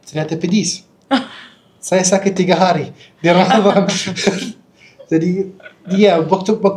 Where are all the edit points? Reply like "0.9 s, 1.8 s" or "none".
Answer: none